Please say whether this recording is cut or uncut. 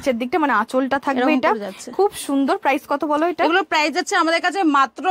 uncut